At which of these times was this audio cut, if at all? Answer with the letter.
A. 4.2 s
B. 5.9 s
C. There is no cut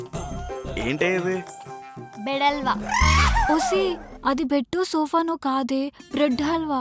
C